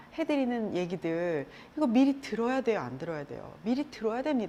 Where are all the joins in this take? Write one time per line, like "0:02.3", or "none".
none